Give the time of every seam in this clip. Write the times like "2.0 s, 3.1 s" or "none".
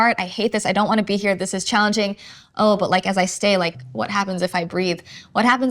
3.8 s